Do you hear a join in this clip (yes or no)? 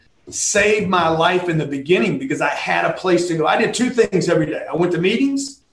no